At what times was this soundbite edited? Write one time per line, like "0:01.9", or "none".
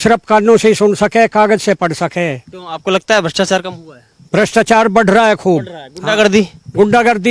none